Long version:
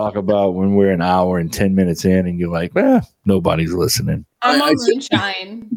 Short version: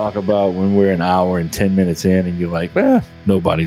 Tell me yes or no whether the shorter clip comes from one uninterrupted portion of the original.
yes